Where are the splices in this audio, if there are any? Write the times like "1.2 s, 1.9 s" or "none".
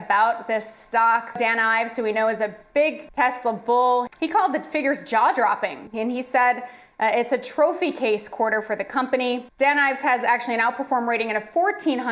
1.4 s, 3.0 s, 4.1 s, 5.8 s, 9.5 s